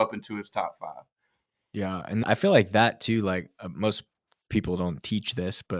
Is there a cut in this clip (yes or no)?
yes